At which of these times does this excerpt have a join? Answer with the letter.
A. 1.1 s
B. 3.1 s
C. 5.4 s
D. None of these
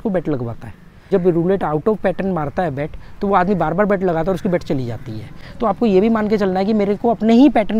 A